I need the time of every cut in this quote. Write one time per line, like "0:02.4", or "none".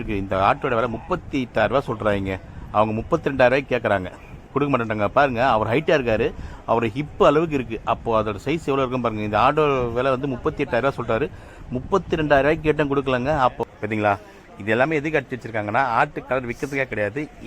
0:13.6